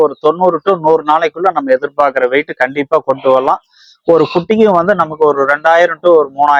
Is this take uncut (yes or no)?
yes